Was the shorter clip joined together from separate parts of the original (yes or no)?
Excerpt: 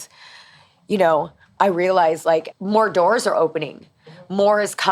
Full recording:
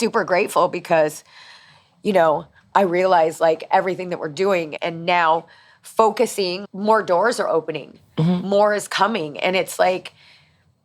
yes